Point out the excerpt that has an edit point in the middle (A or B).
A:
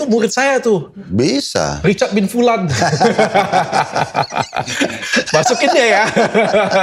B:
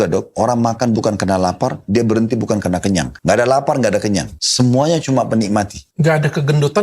B